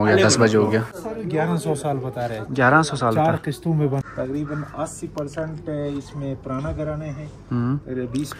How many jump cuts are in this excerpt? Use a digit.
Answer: 2